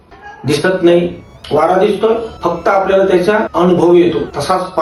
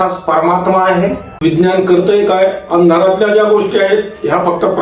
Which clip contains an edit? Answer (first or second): second